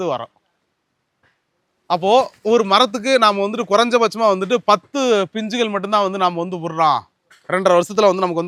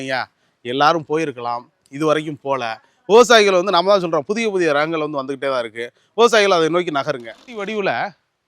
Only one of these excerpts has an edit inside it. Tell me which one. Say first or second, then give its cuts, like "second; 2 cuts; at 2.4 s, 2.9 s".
second; 1 cut; at 7.6 s